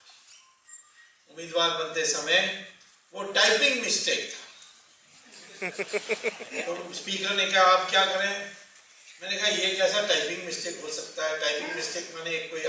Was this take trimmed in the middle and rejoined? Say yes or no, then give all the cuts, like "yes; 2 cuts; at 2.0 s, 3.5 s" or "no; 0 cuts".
no; 0 cuts